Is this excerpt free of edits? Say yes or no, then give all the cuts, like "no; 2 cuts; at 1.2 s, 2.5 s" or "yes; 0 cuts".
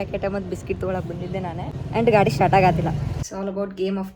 no; 2 cuts; at 1.8 s, 3.3 s